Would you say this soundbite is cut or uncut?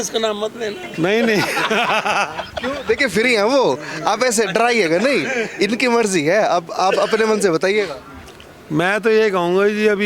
uncut